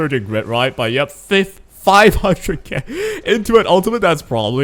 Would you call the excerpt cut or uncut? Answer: uncut